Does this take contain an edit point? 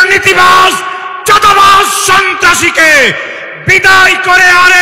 no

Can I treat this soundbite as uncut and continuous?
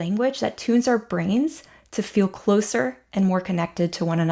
yes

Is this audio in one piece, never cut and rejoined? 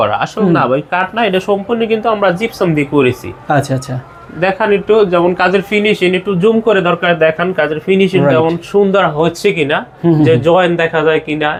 yes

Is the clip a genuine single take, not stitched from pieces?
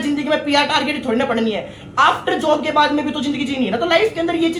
yes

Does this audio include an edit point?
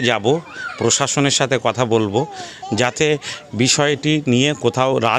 no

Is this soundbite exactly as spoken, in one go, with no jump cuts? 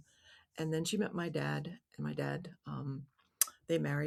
yes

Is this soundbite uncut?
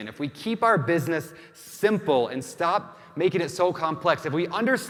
yes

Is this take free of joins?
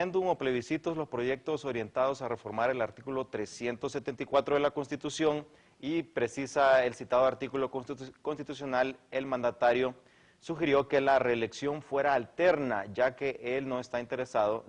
no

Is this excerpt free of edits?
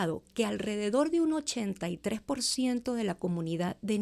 yes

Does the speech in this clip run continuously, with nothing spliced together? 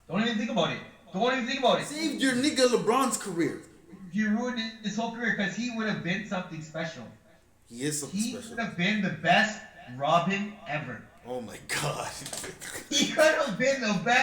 no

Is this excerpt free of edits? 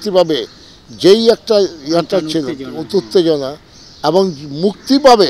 yes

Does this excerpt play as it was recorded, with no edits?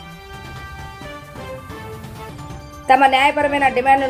yes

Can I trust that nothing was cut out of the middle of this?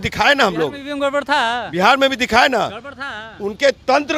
yes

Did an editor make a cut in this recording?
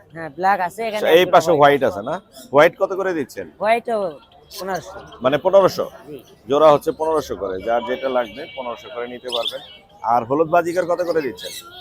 no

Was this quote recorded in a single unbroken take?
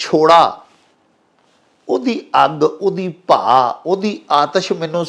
yes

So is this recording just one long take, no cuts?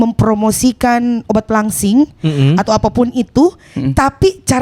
yes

